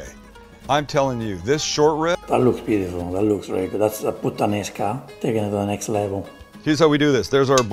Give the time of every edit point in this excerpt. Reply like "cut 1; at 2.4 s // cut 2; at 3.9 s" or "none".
cut 1; at 6.4 s